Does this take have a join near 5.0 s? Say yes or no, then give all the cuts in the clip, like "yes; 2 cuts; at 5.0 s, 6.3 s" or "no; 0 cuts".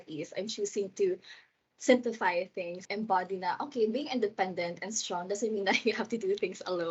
no; 1 cut; at 2.8 s